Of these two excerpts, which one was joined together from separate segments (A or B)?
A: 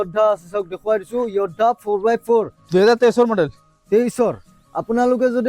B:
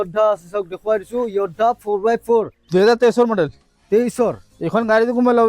A